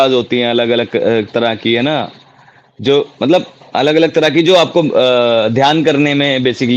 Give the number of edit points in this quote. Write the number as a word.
one